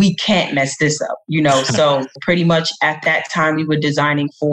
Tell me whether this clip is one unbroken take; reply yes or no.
no